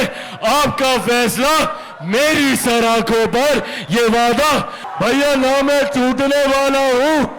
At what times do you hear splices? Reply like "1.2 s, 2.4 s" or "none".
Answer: 4.8 s